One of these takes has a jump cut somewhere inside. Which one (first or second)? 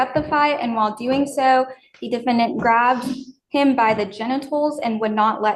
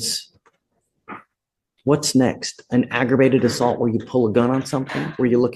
first